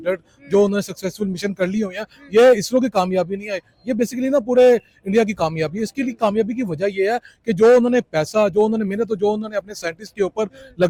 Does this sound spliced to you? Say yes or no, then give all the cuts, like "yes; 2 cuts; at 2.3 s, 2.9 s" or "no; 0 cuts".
no; 0 cuts